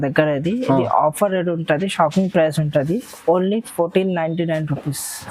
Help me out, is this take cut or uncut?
uncut